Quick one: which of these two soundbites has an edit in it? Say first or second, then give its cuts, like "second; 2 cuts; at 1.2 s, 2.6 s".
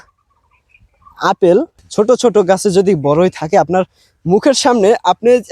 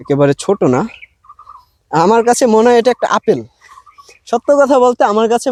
first; 1 cut; at 1.8 s